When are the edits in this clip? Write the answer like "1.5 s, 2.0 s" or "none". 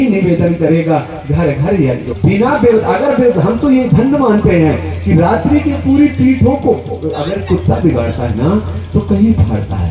2.1 s